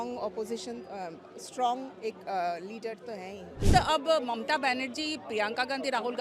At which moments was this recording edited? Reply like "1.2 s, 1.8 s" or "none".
3.6 s

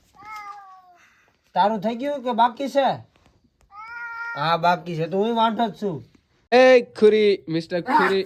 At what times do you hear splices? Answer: 6.5 s

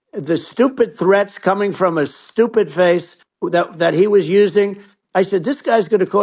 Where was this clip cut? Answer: none

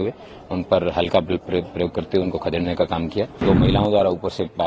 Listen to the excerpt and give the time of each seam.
3.4 s

